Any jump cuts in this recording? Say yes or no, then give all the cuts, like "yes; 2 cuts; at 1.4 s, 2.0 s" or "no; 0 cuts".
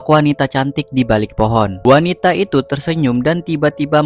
no; 0 cuts